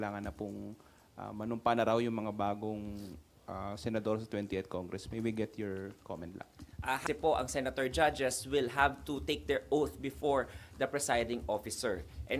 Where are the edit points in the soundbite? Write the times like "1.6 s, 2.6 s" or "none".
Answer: 7.0 s